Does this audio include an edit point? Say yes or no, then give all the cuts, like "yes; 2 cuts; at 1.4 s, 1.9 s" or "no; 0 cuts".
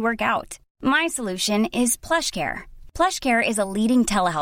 no; 0 cuts